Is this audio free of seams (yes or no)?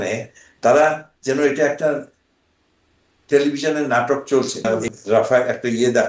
no